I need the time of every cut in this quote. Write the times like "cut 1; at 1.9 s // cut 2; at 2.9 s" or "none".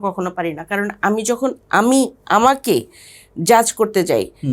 none